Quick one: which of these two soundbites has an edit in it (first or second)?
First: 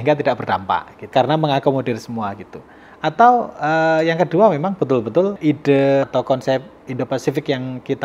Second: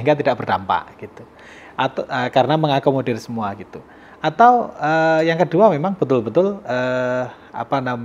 first